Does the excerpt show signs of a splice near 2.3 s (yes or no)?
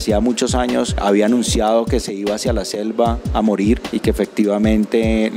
no